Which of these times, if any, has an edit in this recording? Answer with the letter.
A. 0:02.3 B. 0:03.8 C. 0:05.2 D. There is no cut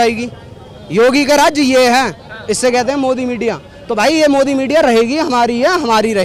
D